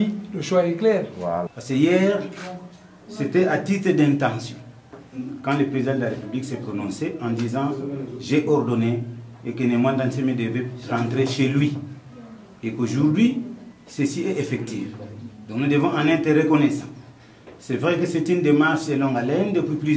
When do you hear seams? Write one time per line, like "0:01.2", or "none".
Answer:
0:01.5